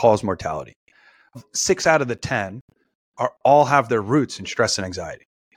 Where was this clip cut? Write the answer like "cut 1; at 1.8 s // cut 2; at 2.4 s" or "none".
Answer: cut 1; at 1.4 s